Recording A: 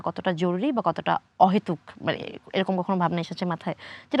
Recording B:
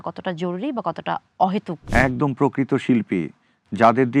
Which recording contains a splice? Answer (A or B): B